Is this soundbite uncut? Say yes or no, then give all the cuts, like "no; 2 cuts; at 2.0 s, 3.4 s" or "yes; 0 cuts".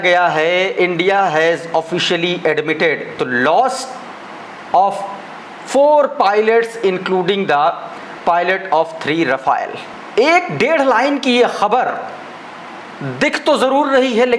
yes; 0 cuts